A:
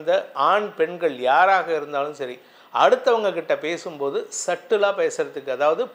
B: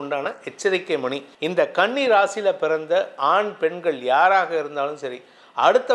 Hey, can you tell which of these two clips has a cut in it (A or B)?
B